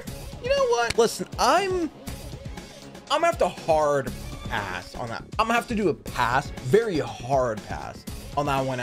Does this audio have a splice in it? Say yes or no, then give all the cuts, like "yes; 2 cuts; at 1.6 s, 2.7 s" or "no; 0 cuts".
yes; 2 cuts; at 0.9 s, 5.2 s